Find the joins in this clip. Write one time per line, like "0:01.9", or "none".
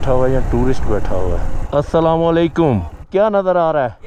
0:01.5
0:03.0